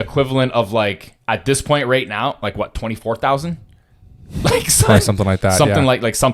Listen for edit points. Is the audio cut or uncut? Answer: uncut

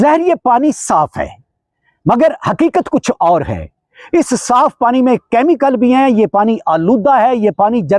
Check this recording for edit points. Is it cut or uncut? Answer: uncut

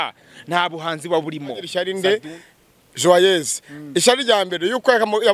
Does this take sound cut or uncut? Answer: cut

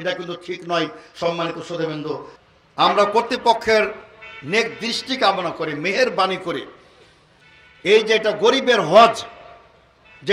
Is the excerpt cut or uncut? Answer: cut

